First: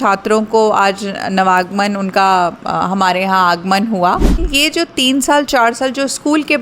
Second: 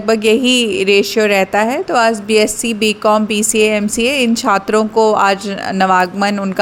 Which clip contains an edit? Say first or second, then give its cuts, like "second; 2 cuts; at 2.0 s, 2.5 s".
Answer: first; 1 cut; at 4.4 s